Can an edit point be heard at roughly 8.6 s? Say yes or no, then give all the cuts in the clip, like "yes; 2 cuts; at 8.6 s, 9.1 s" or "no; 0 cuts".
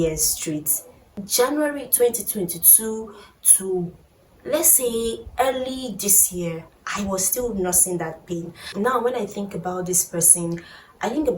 yes; 2 cuts; at 1.2 s, 8.6 s